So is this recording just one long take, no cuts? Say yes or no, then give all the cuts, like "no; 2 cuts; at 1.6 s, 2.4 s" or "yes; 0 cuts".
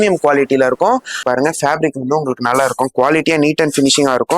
no; 1 cut; at 1.2 s